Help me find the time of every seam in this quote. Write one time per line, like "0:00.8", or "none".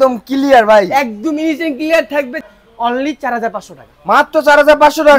0:02.4